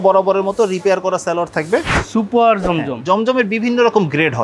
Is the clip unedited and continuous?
no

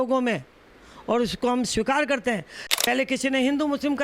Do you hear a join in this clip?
yes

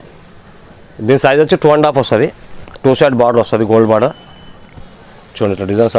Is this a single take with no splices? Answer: yes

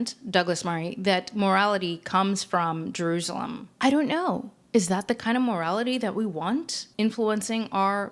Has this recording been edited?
yes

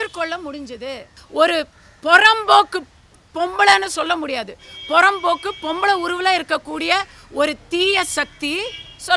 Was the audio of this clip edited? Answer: yes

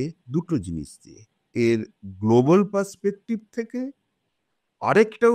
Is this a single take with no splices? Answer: no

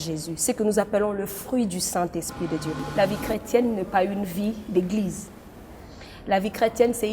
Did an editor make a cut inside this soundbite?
yes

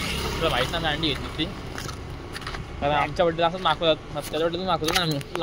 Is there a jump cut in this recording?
no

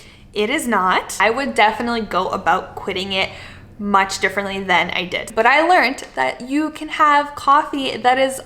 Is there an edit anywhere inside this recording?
yes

